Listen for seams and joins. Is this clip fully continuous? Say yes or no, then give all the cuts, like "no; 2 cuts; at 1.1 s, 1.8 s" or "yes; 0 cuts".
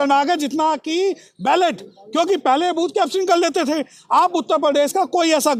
yes; 0 cuts